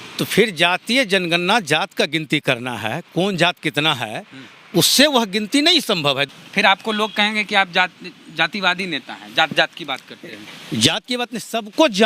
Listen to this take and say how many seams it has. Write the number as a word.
one